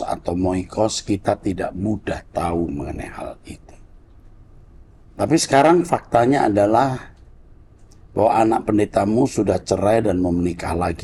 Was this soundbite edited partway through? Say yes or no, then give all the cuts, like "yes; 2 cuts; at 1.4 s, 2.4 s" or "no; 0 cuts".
no; 0 cuts